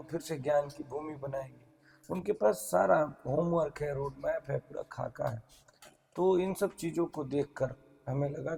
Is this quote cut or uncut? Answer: uncut